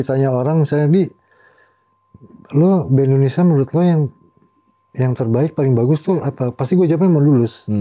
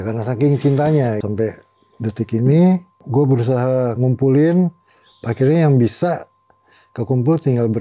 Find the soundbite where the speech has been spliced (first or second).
second